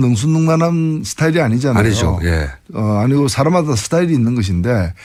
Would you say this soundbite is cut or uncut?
uncut